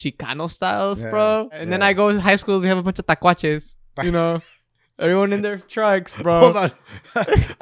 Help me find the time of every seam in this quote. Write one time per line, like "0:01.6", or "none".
0:01.6